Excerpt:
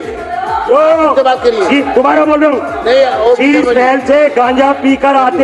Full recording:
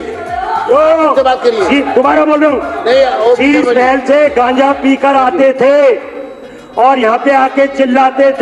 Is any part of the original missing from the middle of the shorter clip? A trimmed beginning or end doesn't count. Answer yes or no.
no